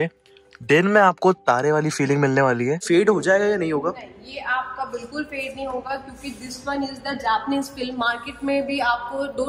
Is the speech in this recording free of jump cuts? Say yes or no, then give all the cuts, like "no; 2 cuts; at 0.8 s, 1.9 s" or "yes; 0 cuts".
no; 1 cut; at 2.8 s